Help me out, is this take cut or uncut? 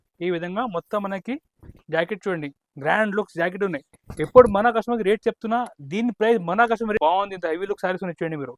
cut